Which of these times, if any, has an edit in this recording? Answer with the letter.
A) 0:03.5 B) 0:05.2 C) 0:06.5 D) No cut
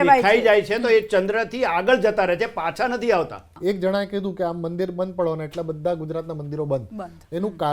A